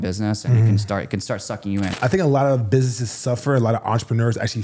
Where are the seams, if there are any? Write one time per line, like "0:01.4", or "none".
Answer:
0:01.9